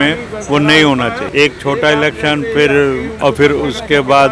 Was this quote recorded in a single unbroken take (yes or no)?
no